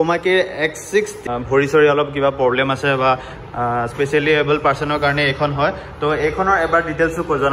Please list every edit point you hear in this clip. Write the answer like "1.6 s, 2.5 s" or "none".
none